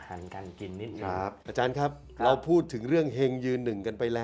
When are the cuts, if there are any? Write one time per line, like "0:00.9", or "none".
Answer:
0:01.4